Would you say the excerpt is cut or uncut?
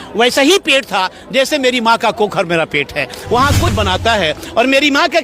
cut